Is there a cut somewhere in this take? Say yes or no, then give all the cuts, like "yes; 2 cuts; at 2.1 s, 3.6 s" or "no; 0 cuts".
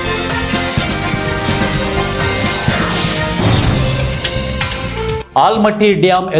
no; 0 cuts